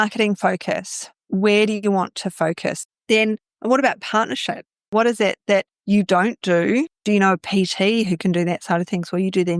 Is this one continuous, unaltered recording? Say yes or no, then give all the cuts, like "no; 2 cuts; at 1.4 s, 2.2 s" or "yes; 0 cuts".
no; 1 cut; at 2.8 s